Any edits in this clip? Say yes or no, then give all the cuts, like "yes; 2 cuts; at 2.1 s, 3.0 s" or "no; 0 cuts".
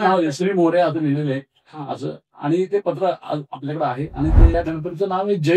yes; 1 cut; at 4.5 s